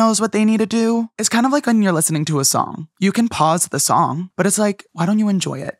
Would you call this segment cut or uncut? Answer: cut